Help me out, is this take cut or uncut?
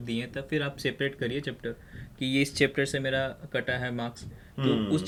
uncut